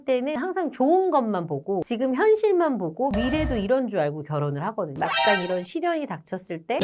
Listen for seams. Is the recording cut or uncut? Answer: cut